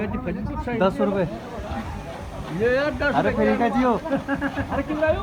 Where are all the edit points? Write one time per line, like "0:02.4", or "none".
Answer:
none